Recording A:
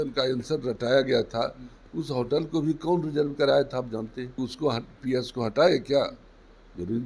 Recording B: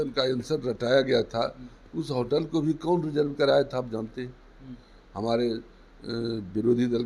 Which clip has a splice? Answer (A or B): A